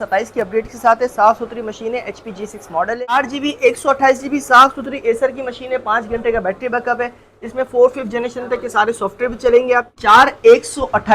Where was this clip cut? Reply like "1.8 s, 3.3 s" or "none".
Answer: 3.0 s, 9.9 s